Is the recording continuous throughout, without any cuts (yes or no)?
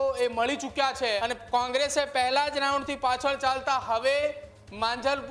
no